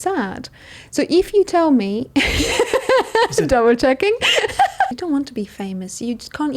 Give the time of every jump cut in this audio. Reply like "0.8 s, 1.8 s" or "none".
4.9 s